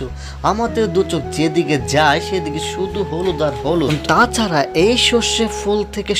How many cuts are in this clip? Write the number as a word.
zero